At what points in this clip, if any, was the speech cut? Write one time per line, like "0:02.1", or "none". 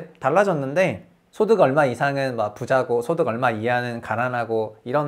none